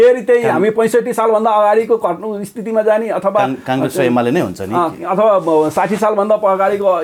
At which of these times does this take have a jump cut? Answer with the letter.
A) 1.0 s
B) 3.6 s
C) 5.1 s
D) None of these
D